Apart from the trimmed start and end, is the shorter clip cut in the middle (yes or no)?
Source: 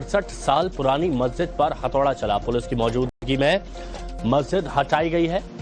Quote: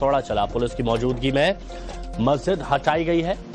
yes